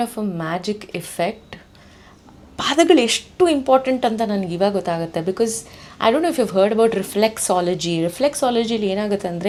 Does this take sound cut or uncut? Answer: uncut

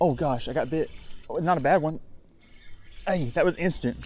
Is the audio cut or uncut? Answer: uncut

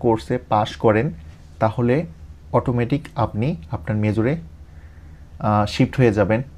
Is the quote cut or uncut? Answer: uncut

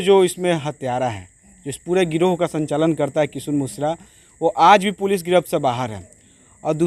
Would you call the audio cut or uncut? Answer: uncut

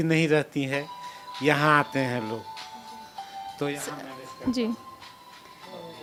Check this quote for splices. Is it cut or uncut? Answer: uncut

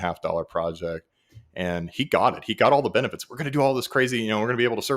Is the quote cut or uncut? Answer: uncut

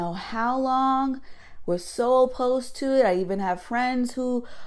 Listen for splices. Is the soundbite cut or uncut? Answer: uncut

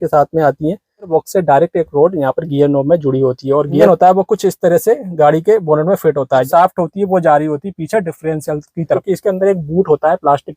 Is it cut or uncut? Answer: cut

